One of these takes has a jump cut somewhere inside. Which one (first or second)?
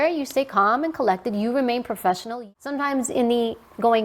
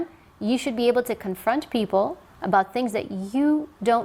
first